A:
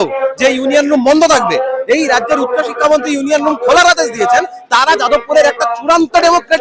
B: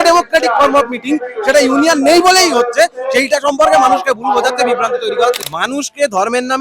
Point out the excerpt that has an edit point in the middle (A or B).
B